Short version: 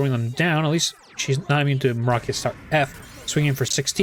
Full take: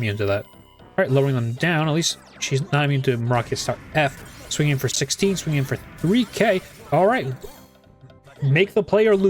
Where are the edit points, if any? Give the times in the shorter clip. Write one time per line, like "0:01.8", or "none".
none